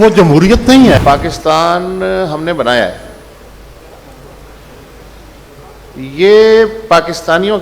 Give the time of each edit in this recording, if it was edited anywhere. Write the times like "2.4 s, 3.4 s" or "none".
1.0 s